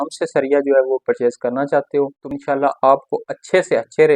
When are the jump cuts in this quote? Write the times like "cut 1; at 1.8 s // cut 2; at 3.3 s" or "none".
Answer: cut 1; at 2.3 s

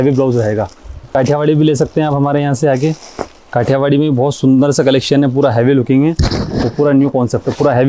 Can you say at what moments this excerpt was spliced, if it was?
cut 1; at 1.1 s

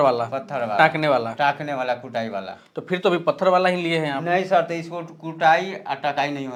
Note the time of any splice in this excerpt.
none

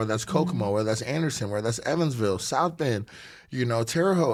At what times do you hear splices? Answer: none

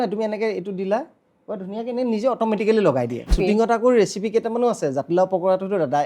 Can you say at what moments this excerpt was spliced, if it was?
cut 1; at 3.3 s

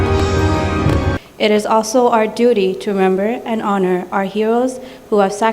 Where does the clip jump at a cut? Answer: cut 1; at 1.2 s

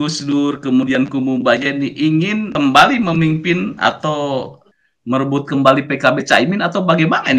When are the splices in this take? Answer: cut 1; at 2.5 s // cut 2; at 4.6 s

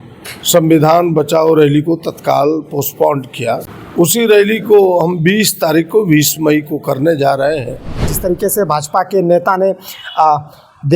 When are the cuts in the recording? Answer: cut 1; at 3.8 s // cut 2; at 8.1 s

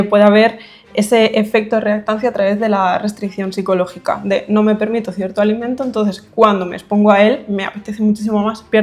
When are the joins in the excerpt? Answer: none

